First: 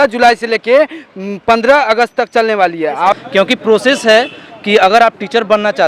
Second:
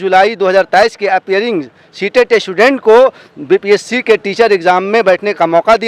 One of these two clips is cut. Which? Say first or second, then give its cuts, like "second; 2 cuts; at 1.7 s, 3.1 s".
first; 1 cut; at 3.1 s